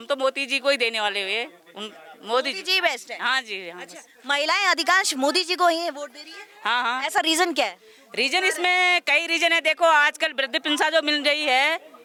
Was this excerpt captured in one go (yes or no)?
yes